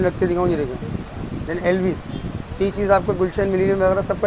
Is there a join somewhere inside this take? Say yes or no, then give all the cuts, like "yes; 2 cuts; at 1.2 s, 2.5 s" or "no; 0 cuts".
no; 0 cuts